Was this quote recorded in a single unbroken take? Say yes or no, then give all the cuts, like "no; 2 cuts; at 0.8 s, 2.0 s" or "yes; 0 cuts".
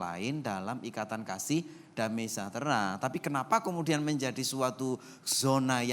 yes; 0 cuts